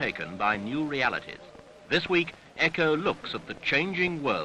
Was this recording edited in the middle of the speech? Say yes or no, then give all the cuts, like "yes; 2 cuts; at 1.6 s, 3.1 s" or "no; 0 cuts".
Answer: no; 0 cuts